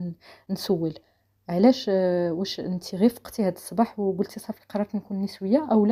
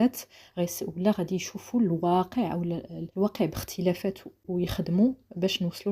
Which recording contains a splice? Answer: second; 2 cuts; at 3.0 s, 4.5 s

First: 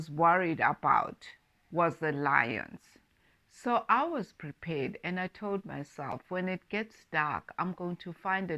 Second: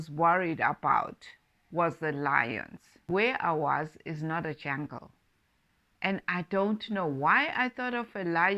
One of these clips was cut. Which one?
first; 1 cut; at 3.1 s

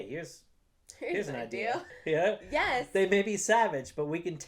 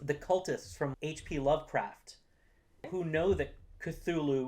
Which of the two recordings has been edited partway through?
second; 2 cuts; at 0.9 s, 2.8 s

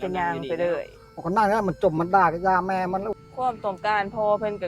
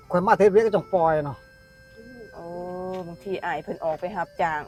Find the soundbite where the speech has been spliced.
first; 1 cut; at 3.2 s

